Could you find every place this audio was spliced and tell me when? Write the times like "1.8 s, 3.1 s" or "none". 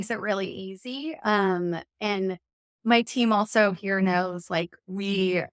none